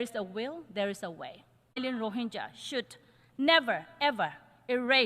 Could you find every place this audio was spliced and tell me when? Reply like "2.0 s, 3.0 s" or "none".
1.8 s